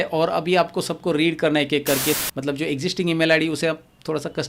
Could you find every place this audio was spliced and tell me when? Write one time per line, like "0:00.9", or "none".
0:02.2